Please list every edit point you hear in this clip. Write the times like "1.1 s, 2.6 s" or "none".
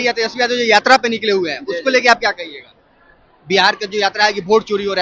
none